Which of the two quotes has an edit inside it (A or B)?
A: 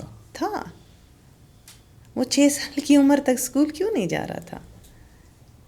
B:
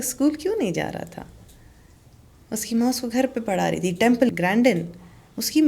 B